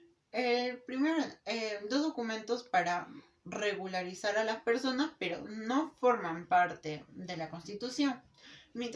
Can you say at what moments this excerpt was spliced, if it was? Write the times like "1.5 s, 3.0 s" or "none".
none